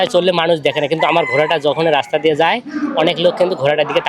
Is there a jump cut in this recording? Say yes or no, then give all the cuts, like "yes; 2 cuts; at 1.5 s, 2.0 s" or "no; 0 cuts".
no; 0 cuts